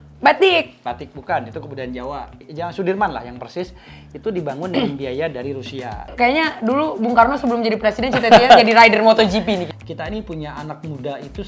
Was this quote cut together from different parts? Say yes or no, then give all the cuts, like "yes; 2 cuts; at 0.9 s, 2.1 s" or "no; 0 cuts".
yes; 3 cuts; at 2.4 s, 6.1 s, 9.7 s